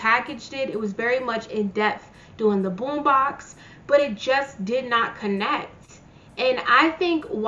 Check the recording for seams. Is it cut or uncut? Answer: uncut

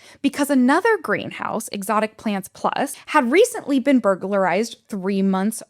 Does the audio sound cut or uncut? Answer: cut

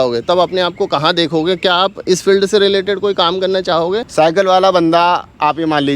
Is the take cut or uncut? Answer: cut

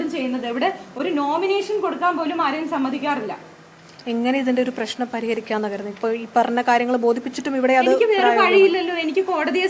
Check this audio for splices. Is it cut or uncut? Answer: uncut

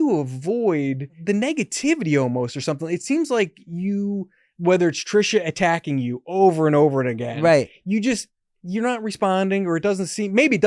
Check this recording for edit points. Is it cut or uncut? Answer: cut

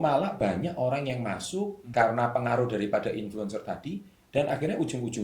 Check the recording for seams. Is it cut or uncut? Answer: cut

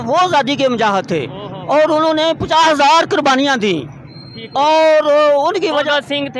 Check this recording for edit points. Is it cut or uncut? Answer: uncut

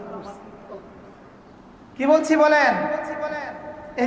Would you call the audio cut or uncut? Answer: cut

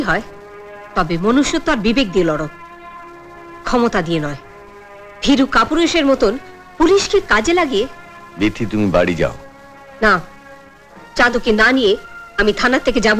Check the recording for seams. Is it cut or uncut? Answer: uncut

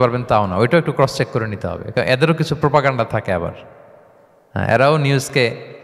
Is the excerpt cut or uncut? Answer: uncut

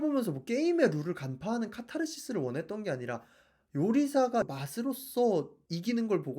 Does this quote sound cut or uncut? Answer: cut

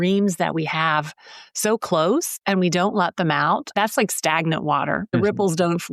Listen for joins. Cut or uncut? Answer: cut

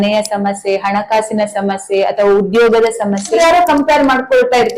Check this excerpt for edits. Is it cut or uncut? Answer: cut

